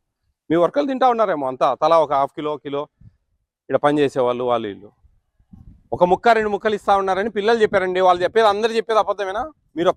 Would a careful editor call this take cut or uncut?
uncut